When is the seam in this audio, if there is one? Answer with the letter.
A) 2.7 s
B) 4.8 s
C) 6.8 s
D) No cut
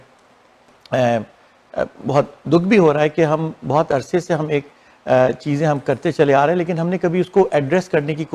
D